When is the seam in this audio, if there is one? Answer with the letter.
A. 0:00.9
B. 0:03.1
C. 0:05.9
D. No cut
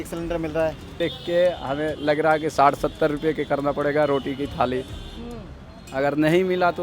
A